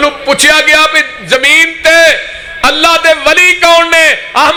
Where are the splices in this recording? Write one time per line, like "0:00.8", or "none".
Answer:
none